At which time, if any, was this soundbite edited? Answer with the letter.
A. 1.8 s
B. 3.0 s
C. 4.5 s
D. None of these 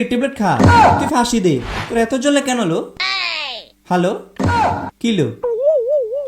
A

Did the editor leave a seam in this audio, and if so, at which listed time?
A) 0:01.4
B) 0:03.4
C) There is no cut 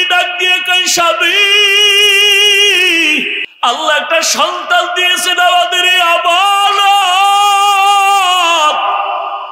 B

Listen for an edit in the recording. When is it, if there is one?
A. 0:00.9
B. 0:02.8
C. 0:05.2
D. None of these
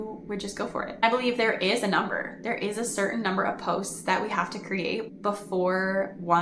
A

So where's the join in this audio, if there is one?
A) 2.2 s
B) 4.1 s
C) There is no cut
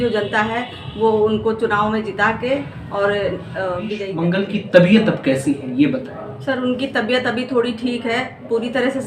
B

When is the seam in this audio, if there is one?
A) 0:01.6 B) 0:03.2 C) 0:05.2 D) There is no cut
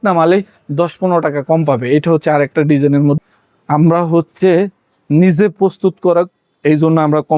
B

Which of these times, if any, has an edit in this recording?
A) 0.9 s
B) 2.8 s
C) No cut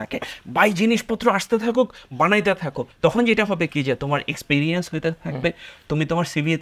B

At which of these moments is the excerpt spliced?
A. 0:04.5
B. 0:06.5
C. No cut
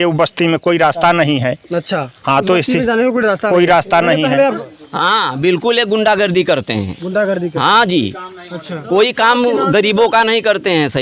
A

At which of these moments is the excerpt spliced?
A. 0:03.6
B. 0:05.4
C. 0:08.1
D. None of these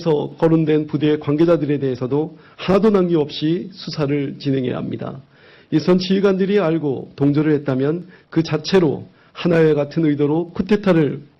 C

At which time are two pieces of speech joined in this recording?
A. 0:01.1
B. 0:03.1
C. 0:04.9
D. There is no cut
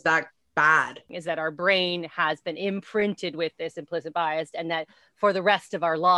A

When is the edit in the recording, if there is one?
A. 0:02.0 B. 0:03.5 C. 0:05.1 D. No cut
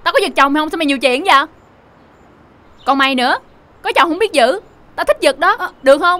D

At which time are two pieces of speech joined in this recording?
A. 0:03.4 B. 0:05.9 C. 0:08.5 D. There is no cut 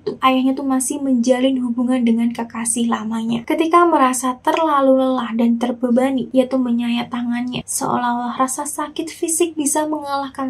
A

